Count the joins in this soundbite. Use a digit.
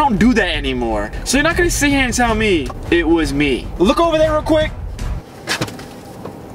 3